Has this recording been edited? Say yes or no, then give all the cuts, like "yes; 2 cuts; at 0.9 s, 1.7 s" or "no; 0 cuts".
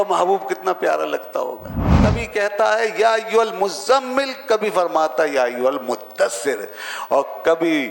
yes; 1 cut; at 2.0 s